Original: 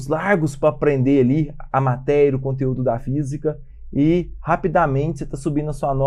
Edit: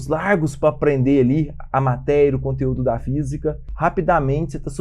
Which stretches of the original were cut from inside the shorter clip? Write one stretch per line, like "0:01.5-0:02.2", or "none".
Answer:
0:03.7-0:04.3